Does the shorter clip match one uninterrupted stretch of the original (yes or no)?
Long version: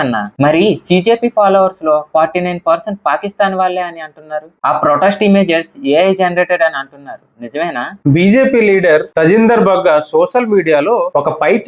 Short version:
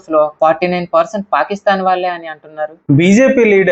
no